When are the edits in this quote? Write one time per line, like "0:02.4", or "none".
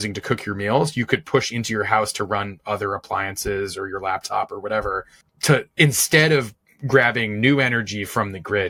none